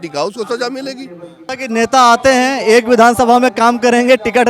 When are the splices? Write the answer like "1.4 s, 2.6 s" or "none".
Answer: 1.5 s